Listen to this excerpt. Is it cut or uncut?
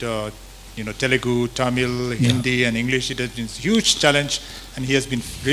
uncut